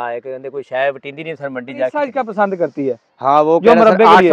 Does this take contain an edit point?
yes; 1 cut; at 2.1 s

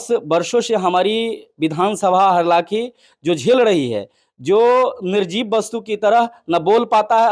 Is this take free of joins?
yes; 0 cuts

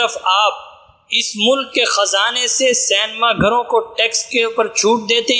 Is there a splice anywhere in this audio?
no; 0 cuts

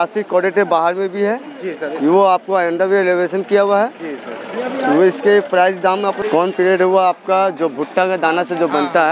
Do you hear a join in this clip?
yes; 1 cut; at 6.2 s

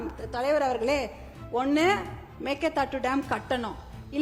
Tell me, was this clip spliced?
no; 0 cuts

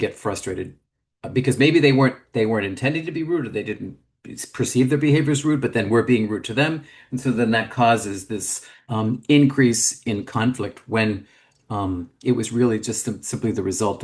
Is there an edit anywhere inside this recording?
no; 0 cuts

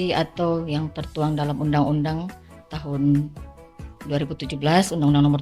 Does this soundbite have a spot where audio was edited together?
no; 0 cuts

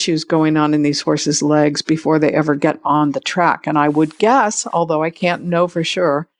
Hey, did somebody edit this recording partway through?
no; 0 cuts

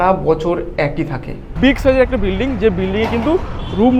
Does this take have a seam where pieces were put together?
yes; 1 cut; at 1.5 s

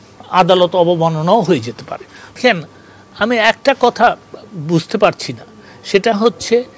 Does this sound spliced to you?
yes; 1 cut; at 2.4 s

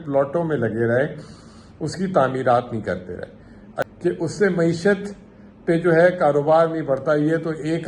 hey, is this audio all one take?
no; 1 cut; at 3.9 s

